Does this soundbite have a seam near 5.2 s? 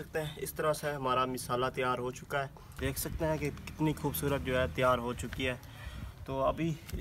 no; 1 cut; at 2.6 s

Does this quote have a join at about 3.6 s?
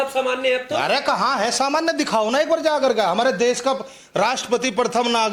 no; 0 cuts

